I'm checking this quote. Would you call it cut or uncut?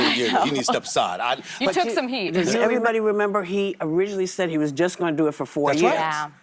cut